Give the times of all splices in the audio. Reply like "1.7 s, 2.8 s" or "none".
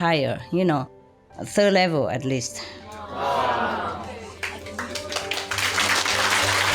none